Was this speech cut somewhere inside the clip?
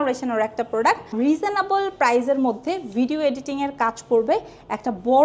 yes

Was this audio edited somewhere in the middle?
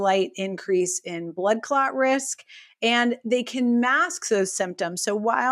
no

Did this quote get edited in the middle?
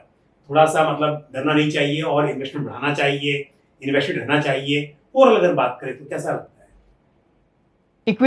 no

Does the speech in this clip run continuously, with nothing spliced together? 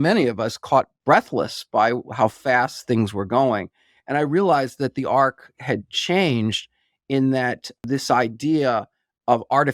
no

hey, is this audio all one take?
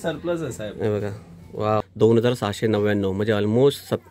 no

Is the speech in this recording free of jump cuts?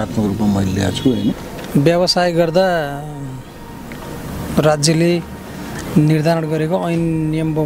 no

